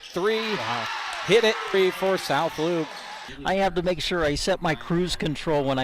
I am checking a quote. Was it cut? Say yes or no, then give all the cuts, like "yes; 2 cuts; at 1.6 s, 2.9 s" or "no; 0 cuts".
yes; 1 cut; at 1.7 s